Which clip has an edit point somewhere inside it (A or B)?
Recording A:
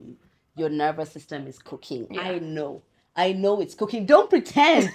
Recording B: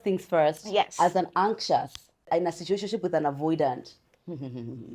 B